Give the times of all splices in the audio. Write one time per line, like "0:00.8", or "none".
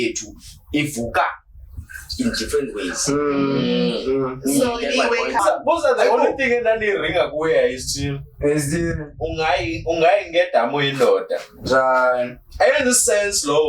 0:05.4